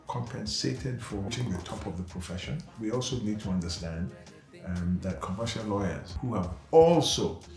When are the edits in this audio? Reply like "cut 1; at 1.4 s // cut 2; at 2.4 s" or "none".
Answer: cut 1; at 1.3 s // cut 2; at 2.7 s // cut 3; at 6.1 s

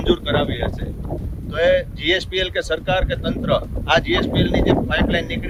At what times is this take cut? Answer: none

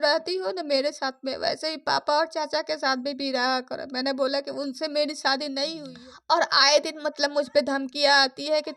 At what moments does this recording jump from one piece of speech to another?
cut 1; at 5.9 s

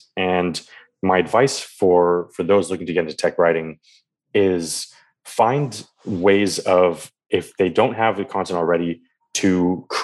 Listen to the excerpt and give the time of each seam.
cut 1; at 7.3 s

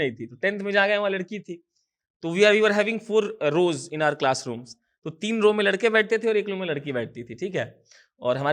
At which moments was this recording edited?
none

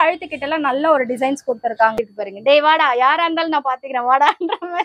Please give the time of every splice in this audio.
cut 1; at 2.0 s

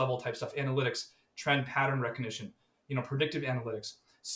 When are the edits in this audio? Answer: none

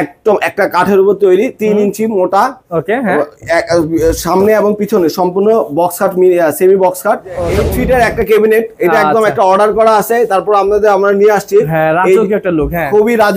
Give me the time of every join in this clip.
cut 1; at 7.5 s

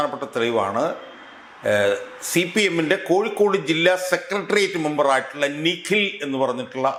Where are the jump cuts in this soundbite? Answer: none

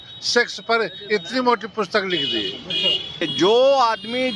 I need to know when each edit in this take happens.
cut 1; at 3.2 s

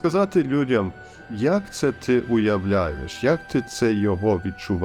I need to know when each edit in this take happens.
none

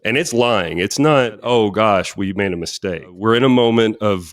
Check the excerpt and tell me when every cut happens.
cut 1; at 1.4 s // cut 2; at 3.1 s

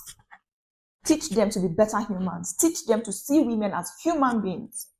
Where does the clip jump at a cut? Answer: none

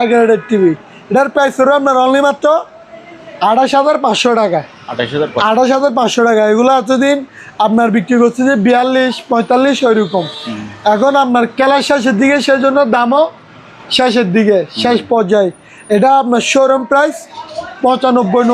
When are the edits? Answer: none

